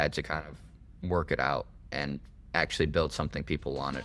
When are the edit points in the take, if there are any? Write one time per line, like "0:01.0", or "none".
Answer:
none

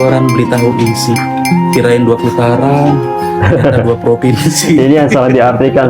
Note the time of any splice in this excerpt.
none

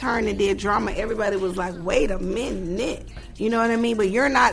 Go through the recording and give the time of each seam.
0:03.1

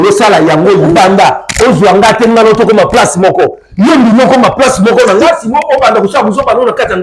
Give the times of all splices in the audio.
none

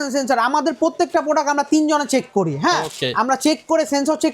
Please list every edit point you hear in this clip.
none

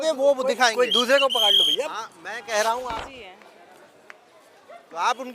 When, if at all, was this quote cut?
0:02.9

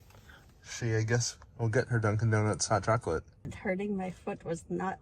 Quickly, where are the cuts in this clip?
0:03.4

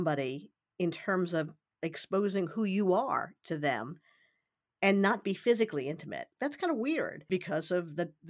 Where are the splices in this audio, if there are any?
0:05.2
0:06.3

